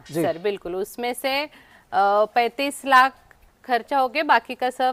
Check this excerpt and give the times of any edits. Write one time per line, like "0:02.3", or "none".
none